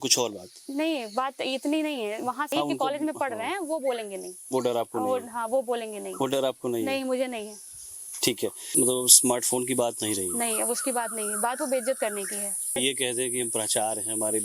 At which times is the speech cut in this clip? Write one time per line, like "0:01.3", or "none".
0:02.5
0:08.6
0:12.8